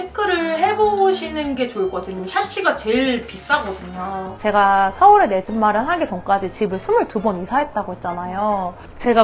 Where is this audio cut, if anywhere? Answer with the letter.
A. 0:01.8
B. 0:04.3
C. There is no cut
B